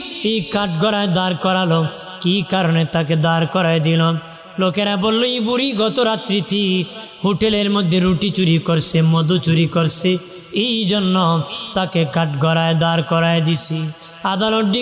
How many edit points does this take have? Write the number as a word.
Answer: zero